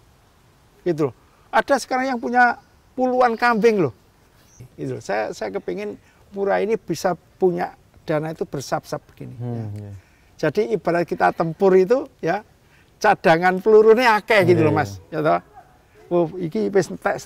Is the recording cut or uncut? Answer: cut